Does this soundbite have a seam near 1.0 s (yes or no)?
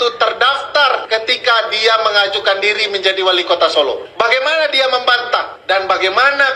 yes